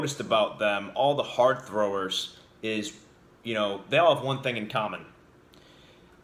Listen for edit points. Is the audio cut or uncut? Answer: uncut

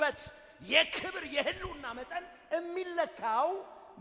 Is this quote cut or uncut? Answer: uncut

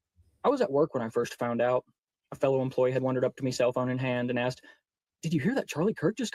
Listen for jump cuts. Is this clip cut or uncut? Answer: uncut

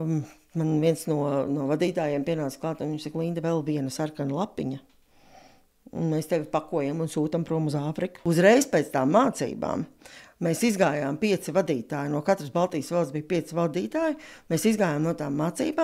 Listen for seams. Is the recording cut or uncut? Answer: cut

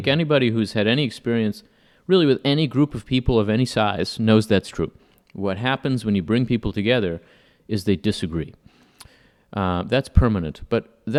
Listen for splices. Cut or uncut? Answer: uncut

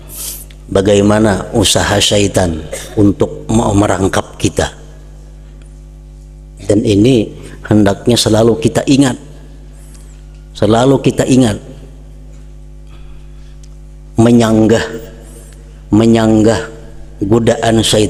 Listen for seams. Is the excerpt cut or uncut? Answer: uncut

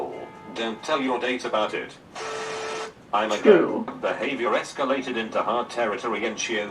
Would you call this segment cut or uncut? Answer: cut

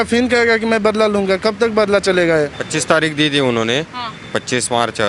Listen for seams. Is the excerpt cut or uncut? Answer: cut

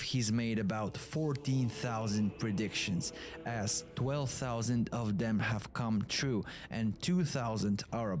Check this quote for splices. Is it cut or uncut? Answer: uncut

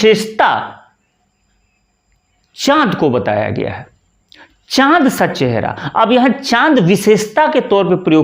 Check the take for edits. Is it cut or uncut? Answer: uncut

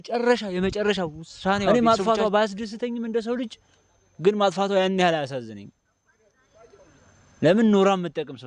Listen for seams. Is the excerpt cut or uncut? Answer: cut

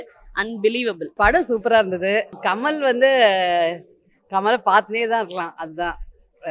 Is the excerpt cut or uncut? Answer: cut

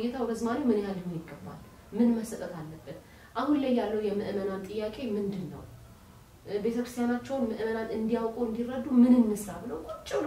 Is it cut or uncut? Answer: uncut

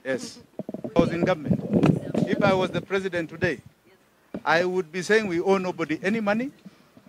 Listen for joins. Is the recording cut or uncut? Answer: cut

